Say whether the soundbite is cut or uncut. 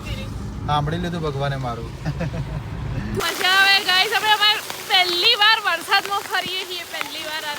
cut